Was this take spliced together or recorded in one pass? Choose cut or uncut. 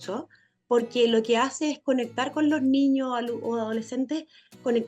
uncut